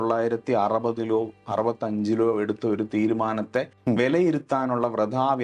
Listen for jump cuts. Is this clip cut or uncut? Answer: cut